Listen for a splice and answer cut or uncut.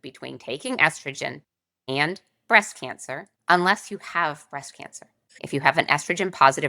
cut